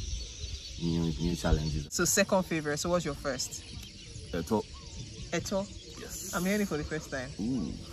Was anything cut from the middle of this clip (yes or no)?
yes